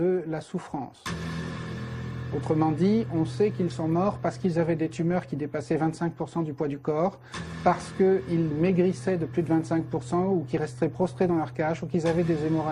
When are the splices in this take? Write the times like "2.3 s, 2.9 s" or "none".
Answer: 1.9 s